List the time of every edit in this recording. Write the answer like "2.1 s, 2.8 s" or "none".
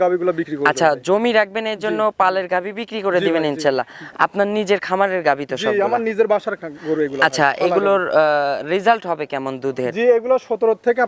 none